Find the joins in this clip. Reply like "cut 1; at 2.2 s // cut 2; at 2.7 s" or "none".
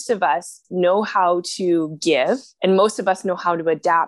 cut 1; at 2.5 s